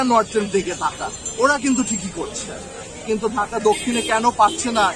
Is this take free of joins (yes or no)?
yes